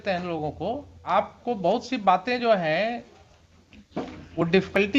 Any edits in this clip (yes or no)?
yes